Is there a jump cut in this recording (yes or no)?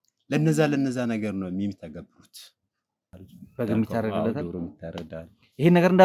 yes